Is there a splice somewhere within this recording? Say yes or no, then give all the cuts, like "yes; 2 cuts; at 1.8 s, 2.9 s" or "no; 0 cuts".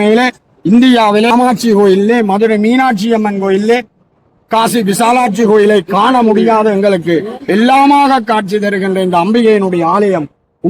yes; 1 cut; at 1.3 s